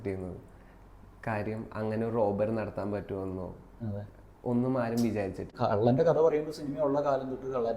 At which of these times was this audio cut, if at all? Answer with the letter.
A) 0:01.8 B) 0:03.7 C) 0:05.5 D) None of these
C